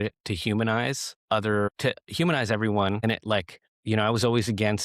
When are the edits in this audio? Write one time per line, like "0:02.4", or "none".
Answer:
0:01.1
0:01.8
0:03.2